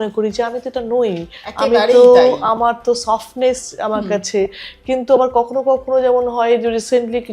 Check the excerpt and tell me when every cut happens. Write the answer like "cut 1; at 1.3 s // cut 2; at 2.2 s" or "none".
none